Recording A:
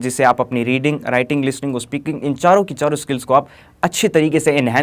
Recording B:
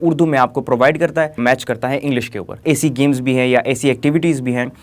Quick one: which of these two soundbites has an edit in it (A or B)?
B